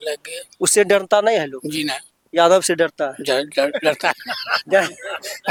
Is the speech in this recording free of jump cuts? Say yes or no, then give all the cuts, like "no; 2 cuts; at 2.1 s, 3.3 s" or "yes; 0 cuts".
yes; 0 cuts